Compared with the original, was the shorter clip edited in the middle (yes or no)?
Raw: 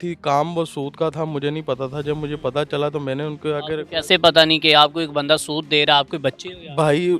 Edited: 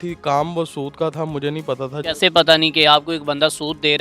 yes